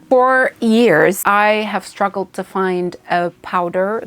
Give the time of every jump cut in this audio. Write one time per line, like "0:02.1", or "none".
0:01.2